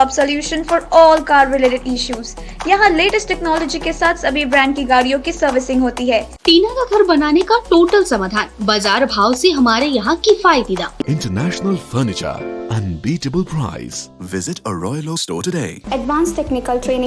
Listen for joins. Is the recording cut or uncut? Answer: cut